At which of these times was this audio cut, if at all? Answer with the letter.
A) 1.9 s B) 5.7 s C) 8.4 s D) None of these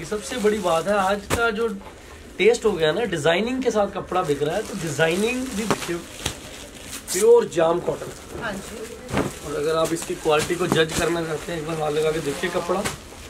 B